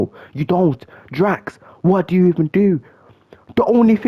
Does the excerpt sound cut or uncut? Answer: uncut